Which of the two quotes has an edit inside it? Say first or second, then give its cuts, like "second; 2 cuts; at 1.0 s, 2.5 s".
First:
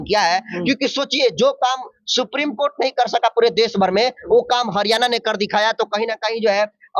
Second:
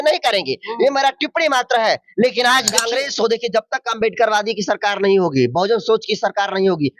second; 1 cut; at 2.9 s